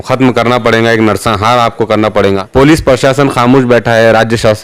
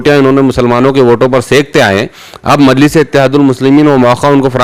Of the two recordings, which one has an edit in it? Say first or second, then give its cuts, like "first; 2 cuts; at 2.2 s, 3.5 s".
first; 1 cut; at 2.4 s